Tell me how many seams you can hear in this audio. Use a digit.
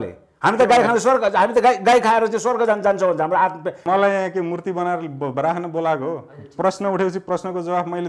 1